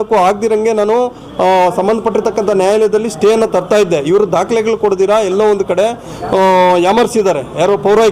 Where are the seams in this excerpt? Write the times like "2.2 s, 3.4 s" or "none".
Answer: none